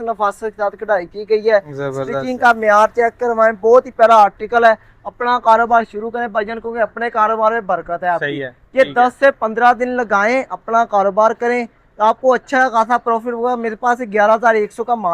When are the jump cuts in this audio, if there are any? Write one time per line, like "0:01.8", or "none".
none